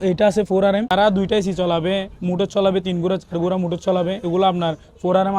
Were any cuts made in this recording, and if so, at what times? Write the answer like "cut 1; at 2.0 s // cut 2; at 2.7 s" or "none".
cut 1; at 0.9 s